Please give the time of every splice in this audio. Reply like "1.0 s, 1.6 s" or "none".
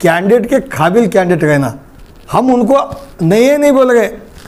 none